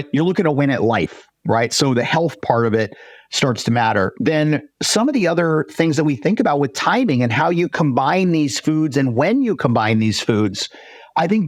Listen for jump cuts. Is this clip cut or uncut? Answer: uncut